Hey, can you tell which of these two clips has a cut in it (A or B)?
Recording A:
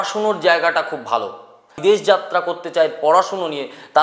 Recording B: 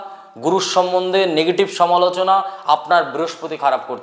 A